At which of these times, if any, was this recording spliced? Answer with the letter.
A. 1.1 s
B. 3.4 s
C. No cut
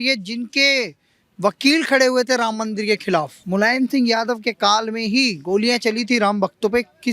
B